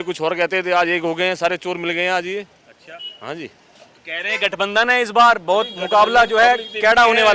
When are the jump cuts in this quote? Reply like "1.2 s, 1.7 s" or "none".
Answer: none